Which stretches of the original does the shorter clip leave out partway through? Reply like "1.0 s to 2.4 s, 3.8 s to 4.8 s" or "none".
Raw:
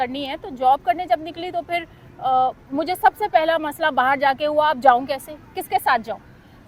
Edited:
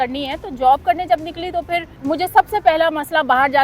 1.9 s to 2.6 s